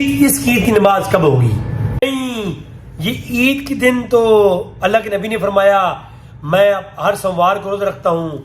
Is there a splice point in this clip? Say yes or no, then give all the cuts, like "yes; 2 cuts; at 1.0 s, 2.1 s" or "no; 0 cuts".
yes; 1 cut; at 2.0 s